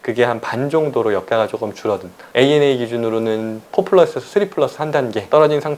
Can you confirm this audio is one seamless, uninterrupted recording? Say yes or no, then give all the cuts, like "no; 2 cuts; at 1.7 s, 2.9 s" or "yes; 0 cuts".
no; 1 cut; at 2.3 s